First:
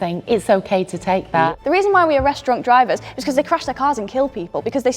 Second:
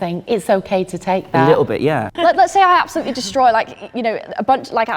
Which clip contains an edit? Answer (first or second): first